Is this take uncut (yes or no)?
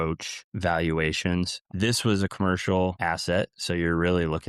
no